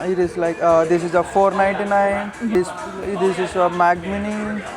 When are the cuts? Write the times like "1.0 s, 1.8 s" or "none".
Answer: 2.5 s